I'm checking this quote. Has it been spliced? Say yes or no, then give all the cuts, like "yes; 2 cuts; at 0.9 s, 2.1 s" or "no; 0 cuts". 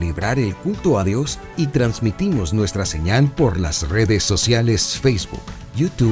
no; 0 cuts